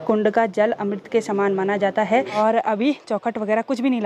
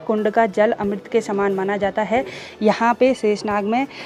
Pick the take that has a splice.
first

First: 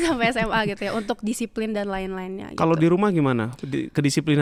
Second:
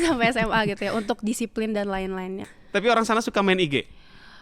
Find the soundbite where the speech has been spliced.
second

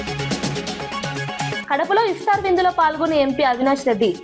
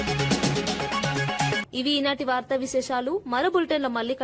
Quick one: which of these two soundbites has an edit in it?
first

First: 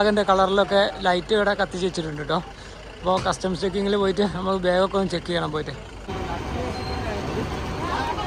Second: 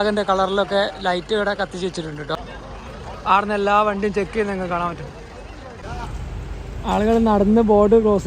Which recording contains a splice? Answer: second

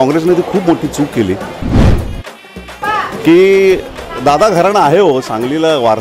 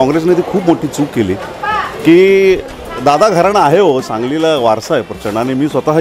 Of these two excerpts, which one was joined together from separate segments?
second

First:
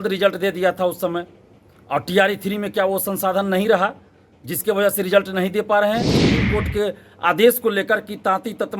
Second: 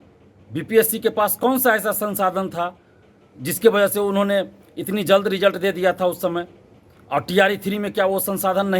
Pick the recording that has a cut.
first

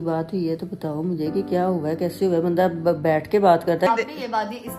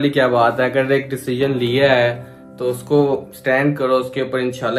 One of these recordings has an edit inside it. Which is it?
first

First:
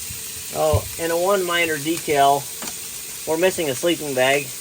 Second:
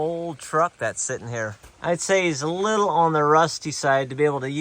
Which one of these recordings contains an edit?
second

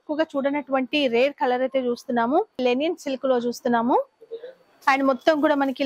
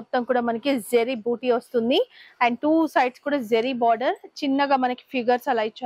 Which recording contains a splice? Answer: first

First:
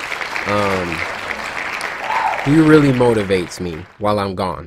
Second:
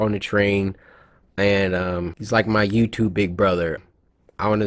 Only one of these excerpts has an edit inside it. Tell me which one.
second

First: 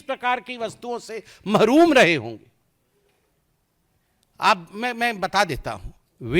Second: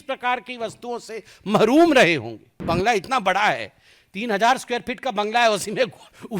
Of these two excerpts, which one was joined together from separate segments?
second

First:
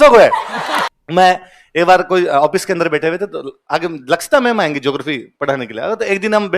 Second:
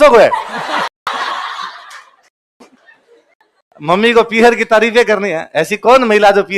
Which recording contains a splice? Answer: first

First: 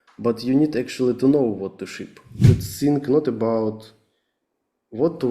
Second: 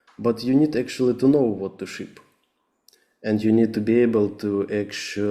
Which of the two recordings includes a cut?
first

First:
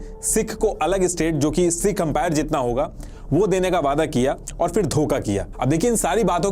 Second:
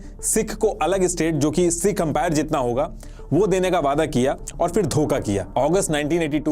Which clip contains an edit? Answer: second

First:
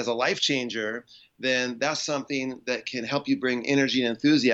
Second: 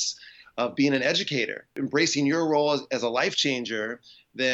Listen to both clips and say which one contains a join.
second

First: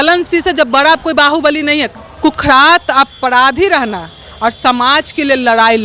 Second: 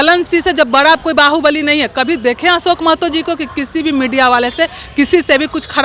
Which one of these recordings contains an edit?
first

